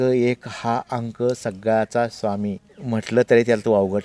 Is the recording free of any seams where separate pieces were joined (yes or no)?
yes